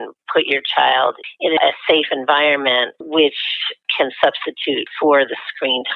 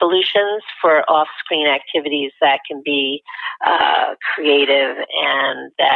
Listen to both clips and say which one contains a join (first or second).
first